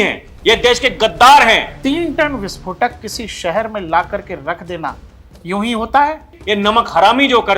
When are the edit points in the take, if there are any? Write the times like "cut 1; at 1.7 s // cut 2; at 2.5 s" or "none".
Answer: cut 1; at 1.8 s // cut 2; at 6.3 s